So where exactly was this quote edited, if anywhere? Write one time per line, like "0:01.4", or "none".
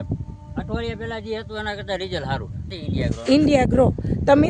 0:02.6